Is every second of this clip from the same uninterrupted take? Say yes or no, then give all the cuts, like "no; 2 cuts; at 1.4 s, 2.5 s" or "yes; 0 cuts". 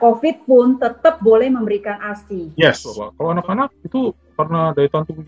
no; 1 cut; at 3.1 s